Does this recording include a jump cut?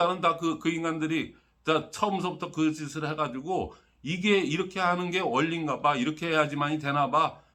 no; 0 cuts

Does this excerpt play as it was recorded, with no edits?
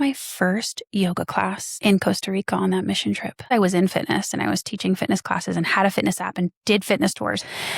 no; 2 cuts; at 1.7 s, 3.5 s

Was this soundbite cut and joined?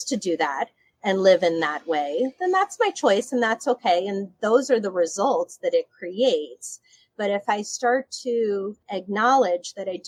no; 0 cuts

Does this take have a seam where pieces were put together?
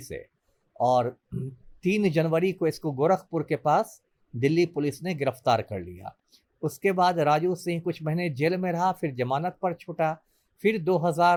no; 0 cuts

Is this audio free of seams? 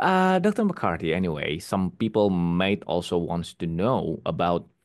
yes; 0 cuts

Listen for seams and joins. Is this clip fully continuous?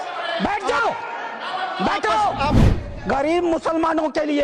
no; 1 cut; at 2.6 s

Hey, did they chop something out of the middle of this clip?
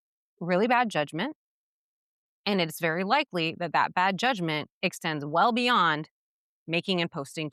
no; 0 cuts

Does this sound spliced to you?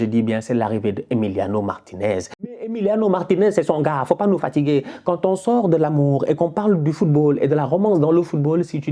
yes; 1 cut; at 2.5 s

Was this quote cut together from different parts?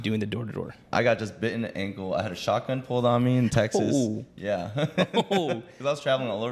yes; 1 cut; at 0.9 s

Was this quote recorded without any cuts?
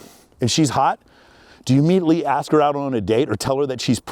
yes; 0 cuts

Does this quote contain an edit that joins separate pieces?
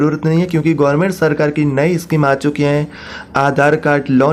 no; 0 cuts

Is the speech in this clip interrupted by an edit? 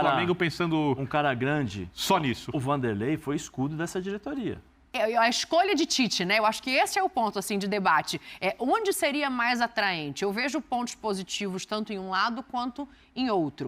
yes; 1 cut; at 4.9 s

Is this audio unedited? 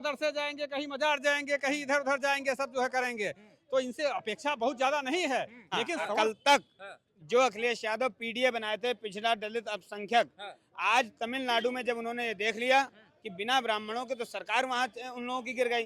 no; 1 cut; at 6.1 s

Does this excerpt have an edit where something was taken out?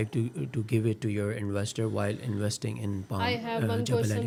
no; 0 cuts

